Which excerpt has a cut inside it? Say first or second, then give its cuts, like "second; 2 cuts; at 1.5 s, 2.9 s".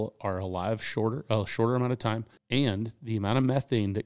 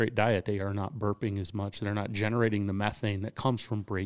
first; 1 cut; at 2.3 s